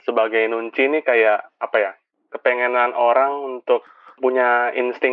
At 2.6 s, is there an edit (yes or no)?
no